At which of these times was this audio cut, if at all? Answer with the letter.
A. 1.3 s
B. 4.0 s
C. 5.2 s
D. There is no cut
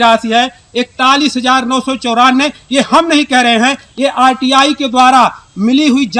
D